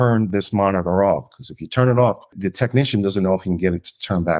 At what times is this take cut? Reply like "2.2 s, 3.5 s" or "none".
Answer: 2.3 s